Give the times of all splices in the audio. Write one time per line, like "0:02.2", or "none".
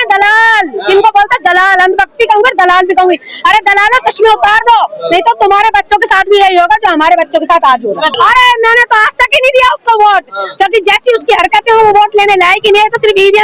0:08.1